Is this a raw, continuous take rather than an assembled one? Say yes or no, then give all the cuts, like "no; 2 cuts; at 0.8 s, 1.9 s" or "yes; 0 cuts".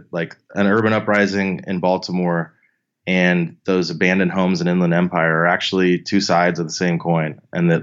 yes; 0 cuts